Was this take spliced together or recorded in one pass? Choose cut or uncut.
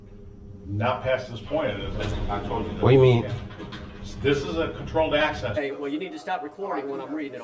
cut